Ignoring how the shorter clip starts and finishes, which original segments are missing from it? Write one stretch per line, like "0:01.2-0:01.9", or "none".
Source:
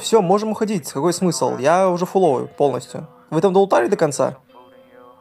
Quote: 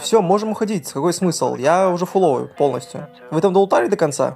none